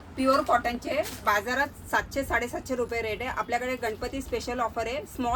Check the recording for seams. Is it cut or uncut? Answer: uncut